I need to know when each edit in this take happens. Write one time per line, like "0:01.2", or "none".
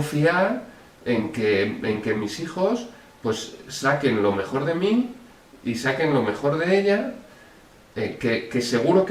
none